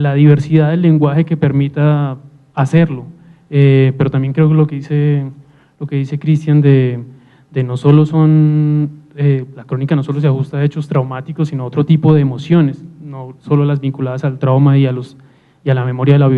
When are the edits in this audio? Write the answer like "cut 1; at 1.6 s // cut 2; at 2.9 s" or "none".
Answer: cut 1; at 11.0 s